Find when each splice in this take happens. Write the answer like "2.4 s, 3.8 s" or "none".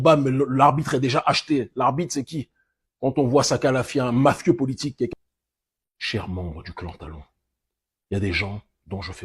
5.1 s

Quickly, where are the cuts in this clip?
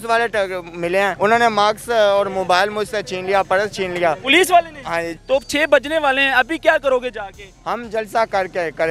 1.1 s, 5.1 s

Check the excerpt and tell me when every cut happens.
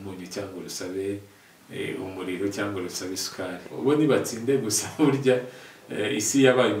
3.8 s

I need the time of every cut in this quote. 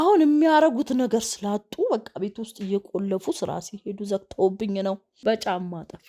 5.1 s

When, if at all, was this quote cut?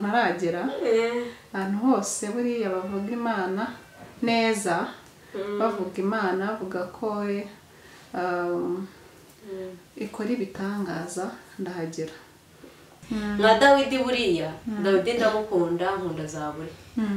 13.0 s

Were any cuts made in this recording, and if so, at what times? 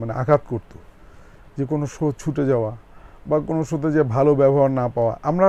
none

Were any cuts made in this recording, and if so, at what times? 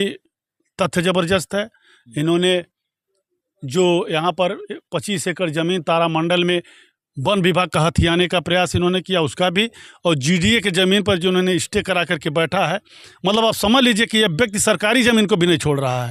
none

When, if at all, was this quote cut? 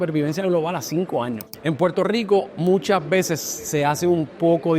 1.4 s

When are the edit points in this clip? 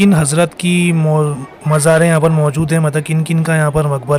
none

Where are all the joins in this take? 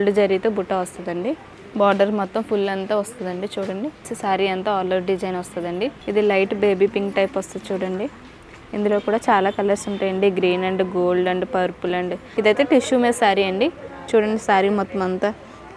4.1 s, 6.0 s, 12.2 s

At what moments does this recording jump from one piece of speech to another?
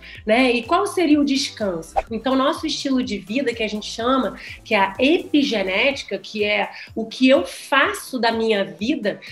2.0 s

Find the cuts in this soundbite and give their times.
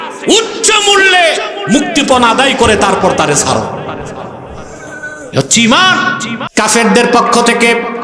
6.3 s

